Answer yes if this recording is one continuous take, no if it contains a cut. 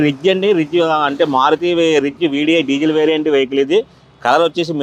yes